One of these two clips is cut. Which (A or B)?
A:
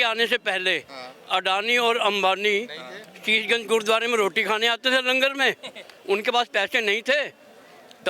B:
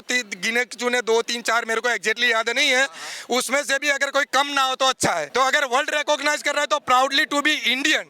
B